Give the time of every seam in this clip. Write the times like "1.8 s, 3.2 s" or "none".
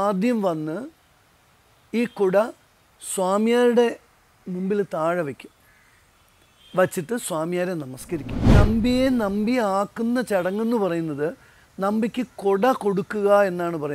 8.5 s